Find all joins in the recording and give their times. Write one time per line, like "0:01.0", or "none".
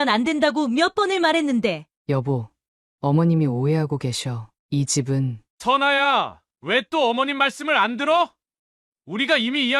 0:01.9
0:05.4